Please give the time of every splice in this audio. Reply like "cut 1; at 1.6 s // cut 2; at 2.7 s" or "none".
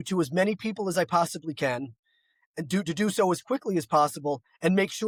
none